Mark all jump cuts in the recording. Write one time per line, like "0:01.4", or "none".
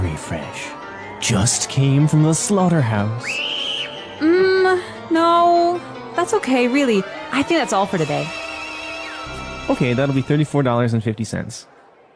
0:09.3